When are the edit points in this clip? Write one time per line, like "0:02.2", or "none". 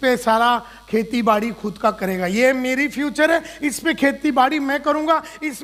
none